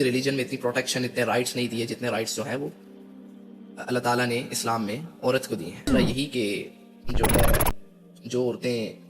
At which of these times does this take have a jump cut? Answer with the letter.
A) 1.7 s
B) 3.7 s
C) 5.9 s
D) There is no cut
C